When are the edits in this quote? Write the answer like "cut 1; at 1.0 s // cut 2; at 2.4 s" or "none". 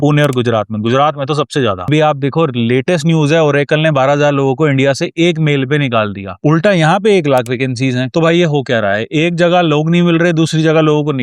cut 1; at 1.8 s